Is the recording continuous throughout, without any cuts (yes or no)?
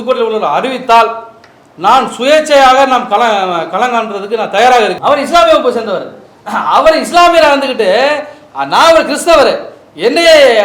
no